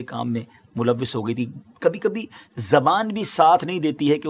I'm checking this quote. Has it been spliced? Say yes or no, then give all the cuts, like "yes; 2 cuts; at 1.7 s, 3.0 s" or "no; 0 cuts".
no; 0 cuts